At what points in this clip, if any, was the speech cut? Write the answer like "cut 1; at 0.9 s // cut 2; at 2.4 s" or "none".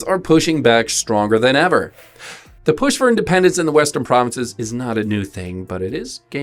cut 1; at 2.0 s